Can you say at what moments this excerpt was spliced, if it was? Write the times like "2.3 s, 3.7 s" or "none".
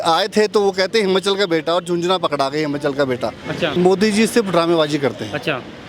3.7 s